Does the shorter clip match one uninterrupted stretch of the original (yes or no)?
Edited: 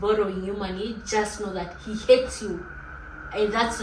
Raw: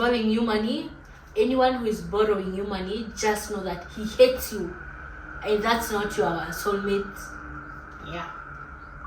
yes